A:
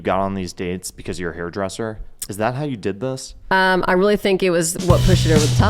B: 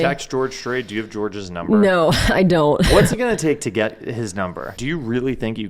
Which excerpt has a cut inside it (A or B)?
B